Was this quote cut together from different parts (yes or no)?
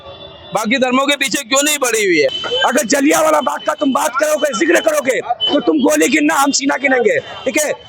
yes